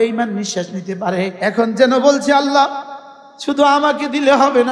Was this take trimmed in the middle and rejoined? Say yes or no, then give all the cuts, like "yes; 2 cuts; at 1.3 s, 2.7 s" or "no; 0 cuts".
yes; 1 cut; at 1.4 s